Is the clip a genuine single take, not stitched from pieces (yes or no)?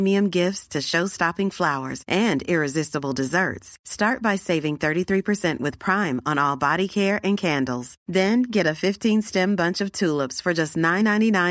yes